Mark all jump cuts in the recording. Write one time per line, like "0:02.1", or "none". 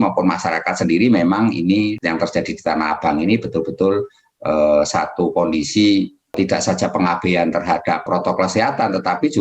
0:02.0
0:06.3
0:08.1